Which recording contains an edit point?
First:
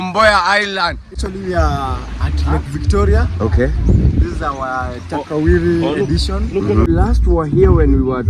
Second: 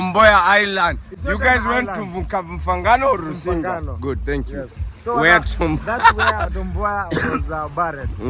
first; 2 cuts; at 1.1 s, 6.9 s

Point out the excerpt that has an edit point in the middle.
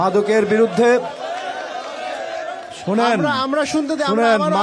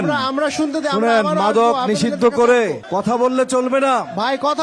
second; 1 cut; at 2.8 s

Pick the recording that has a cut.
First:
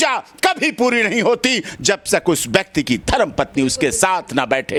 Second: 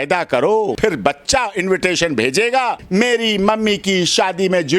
second; 2 cuts; at 0.8 s, 2.8 s

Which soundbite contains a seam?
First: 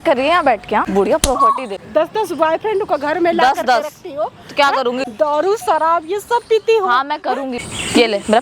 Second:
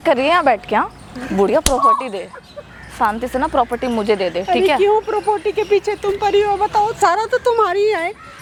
first; 4 cuts; at 0.9 s, 1.8 s, 5.0 s, 7.6 s

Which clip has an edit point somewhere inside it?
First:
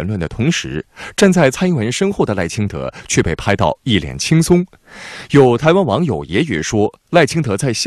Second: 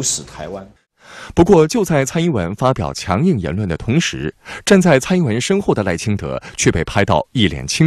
second; 1 cut; at 0.9 s

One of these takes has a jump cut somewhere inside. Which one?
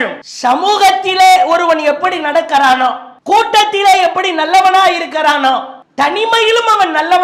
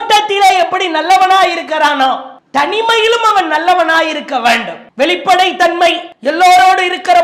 second; 2 cuts; at 4.8 s, 6.1 s

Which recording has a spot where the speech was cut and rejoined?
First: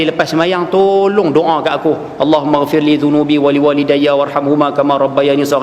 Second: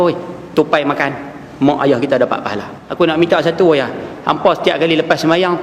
second; 1 cut; at 2.8 s

